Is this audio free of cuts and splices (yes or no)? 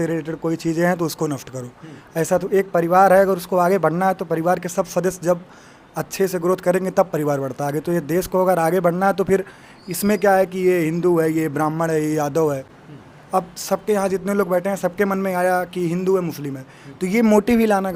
yes